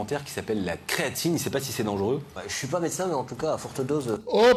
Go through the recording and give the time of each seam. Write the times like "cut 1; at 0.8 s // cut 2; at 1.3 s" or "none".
cut 1; at 2.3 s